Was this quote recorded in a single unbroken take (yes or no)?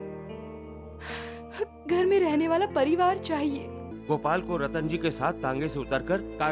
no